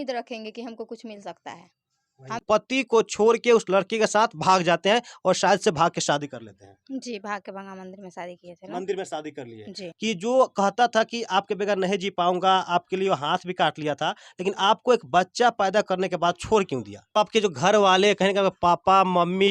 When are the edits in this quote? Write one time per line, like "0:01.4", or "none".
0:02.4
0:09.8
0:17.1